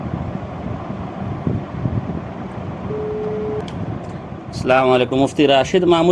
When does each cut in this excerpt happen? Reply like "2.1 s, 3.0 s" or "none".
3.6 s